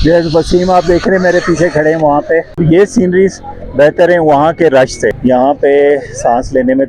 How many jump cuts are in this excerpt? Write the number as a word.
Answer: two